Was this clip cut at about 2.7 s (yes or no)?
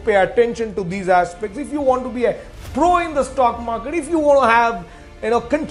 no